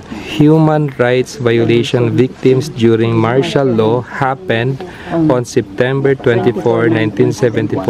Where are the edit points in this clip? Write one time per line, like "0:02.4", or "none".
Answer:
none